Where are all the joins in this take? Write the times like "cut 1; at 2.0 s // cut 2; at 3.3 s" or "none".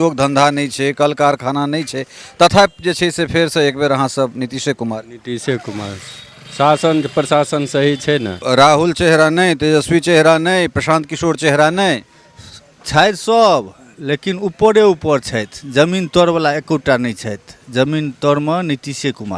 cut 1; at 8.4 s

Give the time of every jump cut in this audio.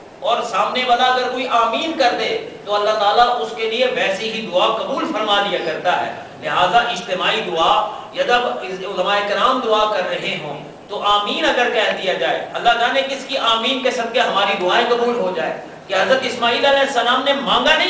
cut 1; at 15.1 s

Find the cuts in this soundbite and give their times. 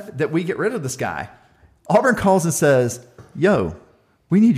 none

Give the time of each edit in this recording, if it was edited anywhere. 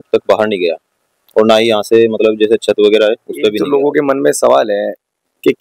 cut 1; at 3.6 s

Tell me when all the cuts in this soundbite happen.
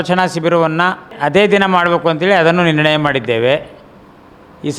cut 1; at 1.1 s

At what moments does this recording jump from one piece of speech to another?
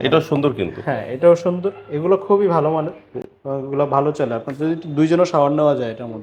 none

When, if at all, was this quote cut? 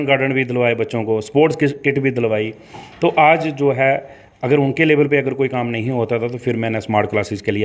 none

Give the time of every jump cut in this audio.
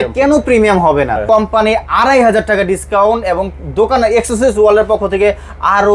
cut 1; at 1.2 s

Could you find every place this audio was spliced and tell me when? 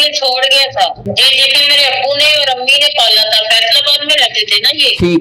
none

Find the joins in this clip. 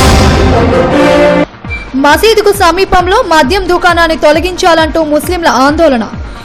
cut 1; at 1.5 s

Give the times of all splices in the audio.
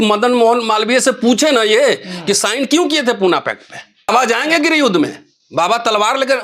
cut 1; at 4.1 s

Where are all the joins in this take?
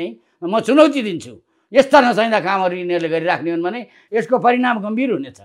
none

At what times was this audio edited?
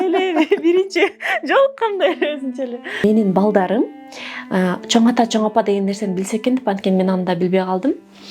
cut 1; at 3.0 s

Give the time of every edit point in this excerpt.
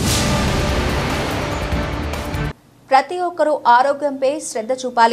cut 1; at 2.5 s

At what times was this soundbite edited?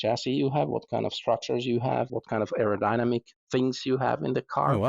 cut 1; at 2.1 s

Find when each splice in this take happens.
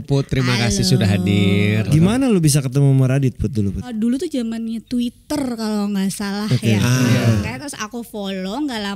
cut 1; at 1.9 s // cut 2; at 3.9 s // cut 3; at 7.2 s

